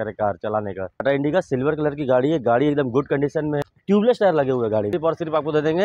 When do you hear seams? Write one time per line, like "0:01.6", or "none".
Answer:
0:01.0
0:03.7
0:04.9